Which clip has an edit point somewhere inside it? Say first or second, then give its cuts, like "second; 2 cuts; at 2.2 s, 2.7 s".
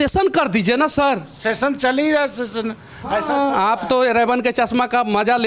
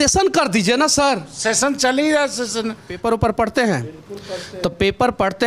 second; 1 cut; at 2.9 s